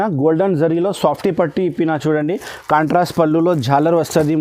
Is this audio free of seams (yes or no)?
yes